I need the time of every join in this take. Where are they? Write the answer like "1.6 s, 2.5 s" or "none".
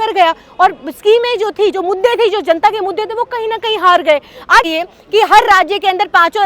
4.7 s